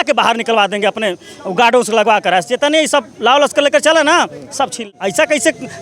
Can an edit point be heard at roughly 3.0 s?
no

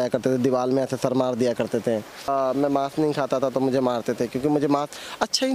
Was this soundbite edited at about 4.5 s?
no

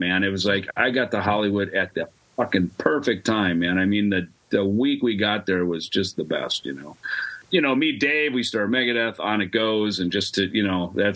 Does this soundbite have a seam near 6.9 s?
yes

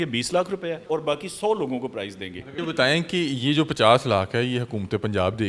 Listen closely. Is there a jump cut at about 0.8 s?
yes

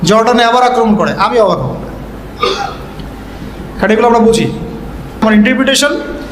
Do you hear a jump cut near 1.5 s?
no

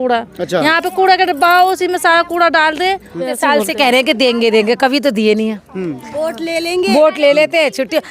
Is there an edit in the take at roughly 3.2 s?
yes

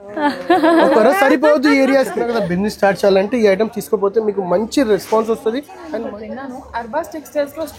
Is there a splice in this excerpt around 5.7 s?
yes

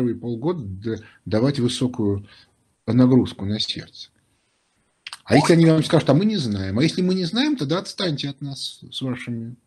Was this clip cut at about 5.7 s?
no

